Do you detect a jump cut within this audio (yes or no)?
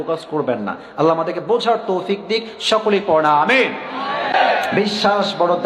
yes